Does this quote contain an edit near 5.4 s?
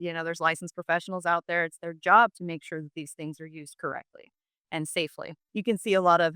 yes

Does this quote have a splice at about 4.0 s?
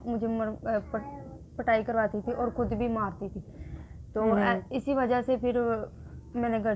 no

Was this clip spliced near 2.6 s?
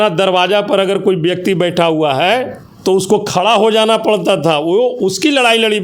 yes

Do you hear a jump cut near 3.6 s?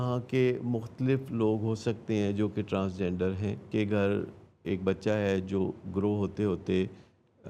yes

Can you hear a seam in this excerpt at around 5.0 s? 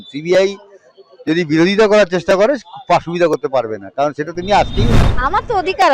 yes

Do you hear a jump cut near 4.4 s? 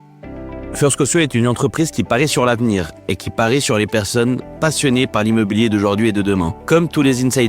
no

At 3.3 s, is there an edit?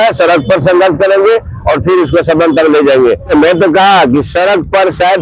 yes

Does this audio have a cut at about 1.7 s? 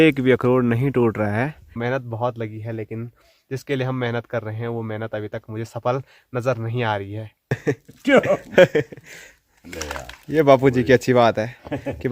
yes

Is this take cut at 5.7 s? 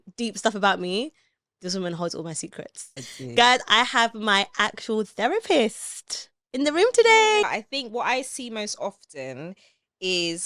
no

